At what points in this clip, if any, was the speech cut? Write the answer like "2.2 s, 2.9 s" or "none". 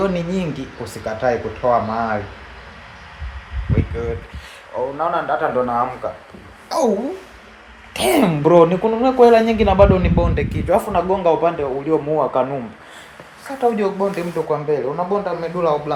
none